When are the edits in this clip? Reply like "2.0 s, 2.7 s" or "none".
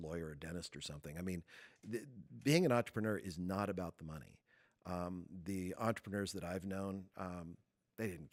none